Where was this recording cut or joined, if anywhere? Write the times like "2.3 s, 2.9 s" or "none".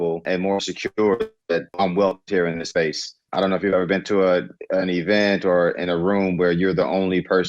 none